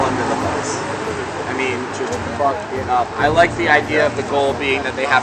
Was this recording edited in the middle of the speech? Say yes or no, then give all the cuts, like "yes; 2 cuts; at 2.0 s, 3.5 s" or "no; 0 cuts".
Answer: no; 0 cuts